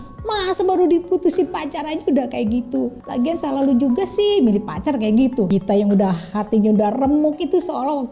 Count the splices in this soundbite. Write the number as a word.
two